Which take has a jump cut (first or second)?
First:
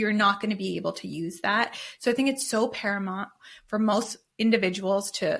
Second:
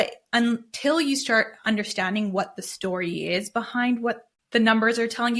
second